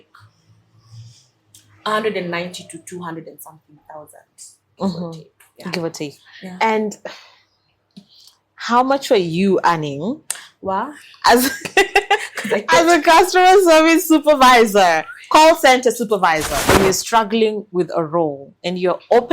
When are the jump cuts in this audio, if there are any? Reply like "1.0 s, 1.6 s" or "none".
16.6 s